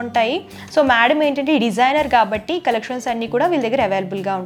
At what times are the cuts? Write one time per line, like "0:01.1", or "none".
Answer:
none